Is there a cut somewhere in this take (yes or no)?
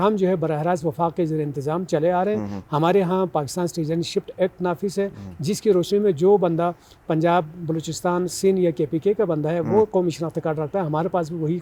no